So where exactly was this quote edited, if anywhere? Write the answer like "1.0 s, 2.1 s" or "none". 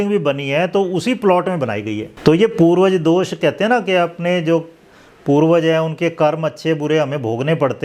2.1 s